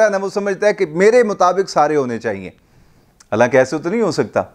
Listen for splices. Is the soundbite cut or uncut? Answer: uncut